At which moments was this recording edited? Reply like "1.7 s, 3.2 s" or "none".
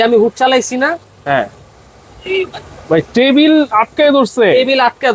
none